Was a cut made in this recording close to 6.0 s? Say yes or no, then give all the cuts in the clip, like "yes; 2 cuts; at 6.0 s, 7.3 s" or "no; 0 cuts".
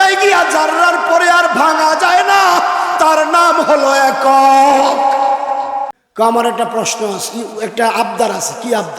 yes; 1 cut; at 6.0 s